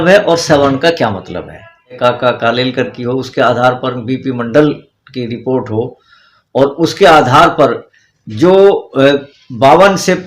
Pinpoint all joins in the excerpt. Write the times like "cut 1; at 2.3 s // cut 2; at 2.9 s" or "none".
cut 1; at 2.0 s